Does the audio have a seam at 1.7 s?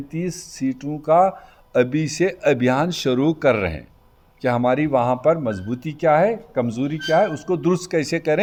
no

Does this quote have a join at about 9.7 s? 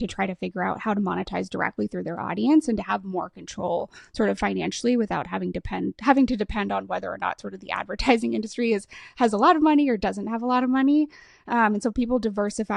no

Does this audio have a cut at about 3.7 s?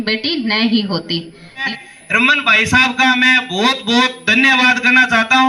no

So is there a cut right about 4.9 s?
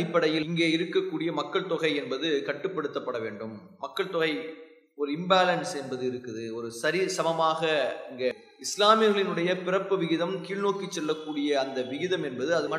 no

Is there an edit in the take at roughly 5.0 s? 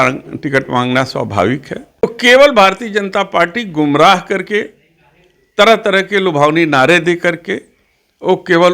no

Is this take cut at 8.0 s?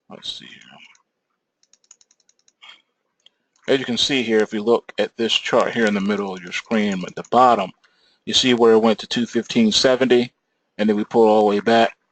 yes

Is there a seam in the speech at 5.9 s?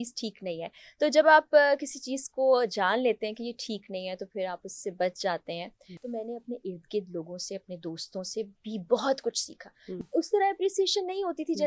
yes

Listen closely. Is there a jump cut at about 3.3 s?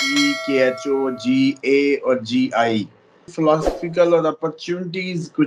yes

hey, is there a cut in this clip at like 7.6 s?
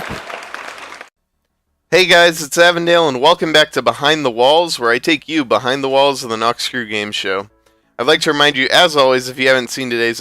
yes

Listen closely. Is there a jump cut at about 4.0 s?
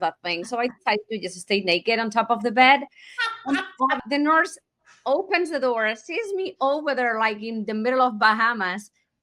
yes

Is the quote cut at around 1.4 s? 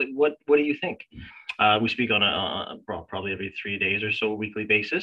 no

